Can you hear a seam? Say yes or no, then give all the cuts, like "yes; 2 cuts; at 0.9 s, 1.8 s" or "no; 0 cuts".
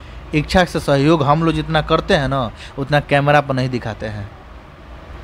no; 0 cuts